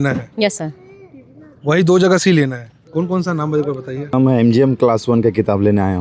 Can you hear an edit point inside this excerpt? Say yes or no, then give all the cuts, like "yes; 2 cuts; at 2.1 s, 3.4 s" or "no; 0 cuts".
yes; 1 cut; at 4.1 s